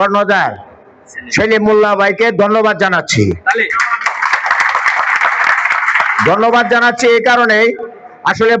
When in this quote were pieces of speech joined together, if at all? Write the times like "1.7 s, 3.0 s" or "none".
none